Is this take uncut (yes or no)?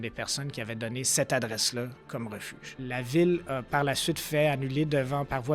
no